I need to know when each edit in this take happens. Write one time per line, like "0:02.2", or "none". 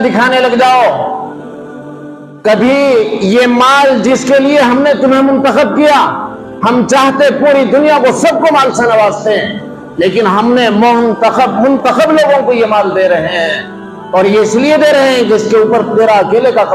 none

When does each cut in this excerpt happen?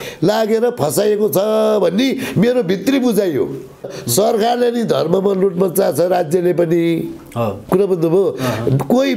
0:04.0

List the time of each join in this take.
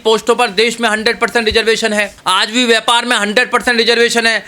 0:02.1

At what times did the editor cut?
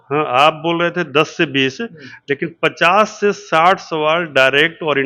none

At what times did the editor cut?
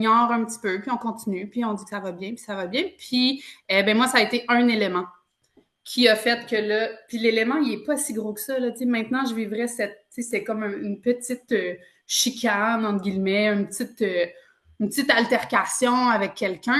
none

